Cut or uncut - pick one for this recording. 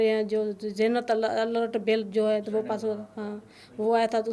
uncut